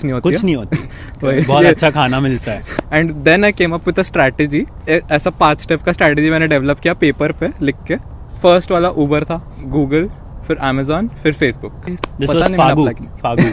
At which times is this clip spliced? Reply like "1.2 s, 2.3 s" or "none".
2.6 s, 4.8 s, 8.3 s, 9.5 s